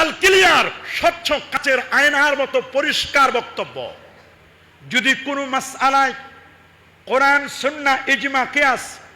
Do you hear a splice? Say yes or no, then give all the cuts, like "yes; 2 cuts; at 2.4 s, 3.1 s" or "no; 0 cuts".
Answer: yes; 1 cut; at 1.6 s